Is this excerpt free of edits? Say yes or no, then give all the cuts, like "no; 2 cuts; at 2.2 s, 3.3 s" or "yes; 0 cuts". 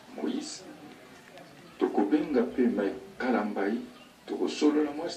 yes; 0 cuts